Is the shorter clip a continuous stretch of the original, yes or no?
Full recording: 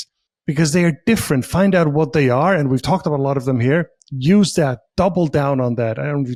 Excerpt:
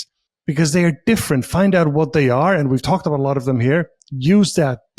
yes